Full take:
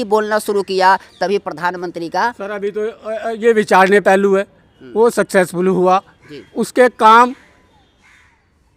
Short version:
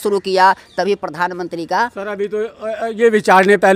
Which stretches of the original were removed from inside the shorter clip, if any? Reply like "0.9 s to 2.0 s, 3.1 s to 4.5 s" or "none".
none